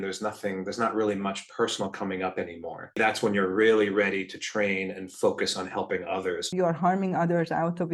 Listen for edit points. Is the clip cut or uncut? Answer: cut